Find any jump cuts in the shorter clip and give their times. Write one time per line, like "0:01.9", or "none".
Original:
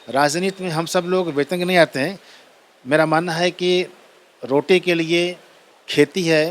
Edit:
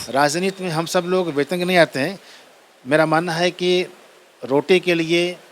none